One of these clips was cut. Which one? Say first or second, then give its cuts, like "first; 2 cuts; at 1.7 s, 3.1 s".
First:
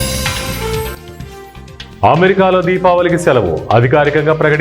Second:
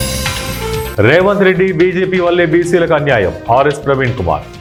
first; 1 cut; at 0.9 s